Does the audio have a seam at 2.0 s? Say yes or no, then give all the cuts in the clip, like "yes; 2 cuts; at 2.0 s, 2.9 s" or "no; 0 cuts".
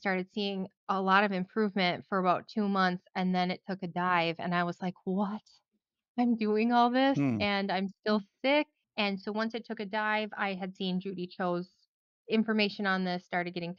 no; 0 cuts